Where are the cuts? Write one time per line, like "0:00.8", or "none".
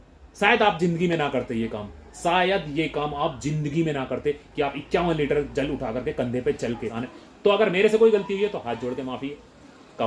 0:07.0